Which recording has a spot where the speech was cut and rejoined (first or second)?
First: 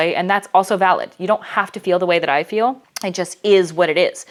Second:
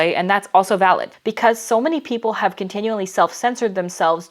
second